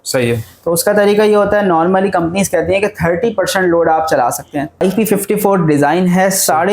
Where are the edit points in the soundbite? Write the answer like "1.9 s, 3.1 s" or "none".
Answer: 4.8 s